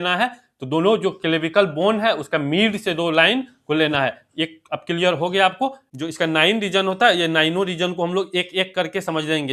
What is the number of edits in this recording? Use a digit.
1